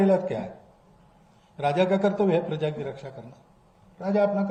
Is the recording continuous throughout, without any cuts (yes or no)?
yes